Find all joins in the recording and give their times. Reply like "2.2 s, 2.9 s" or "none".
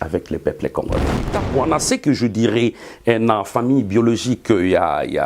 1.4 s